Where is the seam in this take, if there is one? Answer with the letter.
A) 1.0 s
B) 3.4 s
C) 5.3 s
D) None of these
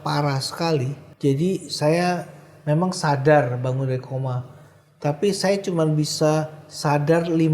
A